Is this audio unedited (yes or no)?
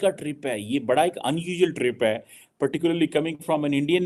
yes